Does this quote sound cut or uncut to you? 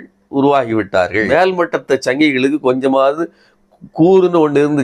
cut